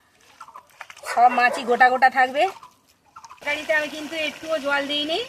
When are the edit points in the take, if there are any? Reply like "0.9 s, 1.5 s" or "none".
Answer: 3.4 s